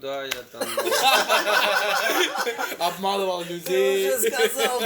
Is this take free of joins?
yes; 0 cuts

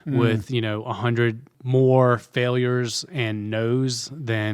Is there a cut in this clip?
yes; 1 cut; at 1.5 s

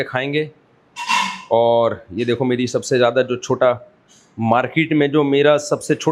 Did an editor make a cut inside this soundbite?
no; 0 cuts

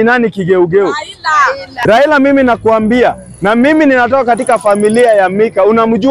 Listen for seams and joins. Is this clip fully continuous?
no; 1 cut; at 1.7 s

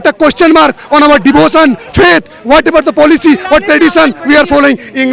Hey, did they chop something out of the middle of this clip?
no; 0 cuts

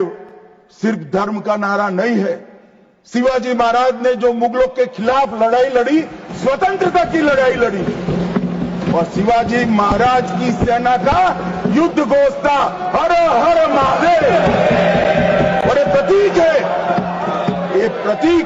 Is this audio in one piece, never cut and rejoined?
yes; 0 cuts

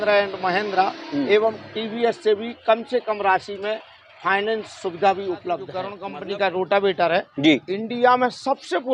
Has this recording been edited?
yes; 1 cut; at 6.0 s

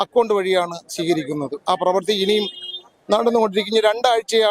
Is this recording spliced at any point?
no; 0 cuts

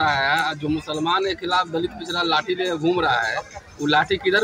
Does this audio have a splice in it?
no; 0 cuts

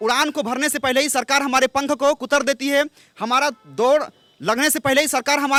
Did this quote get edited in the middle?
no; 0 cuts

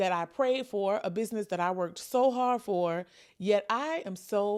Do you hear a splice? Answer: no; 0 cuts

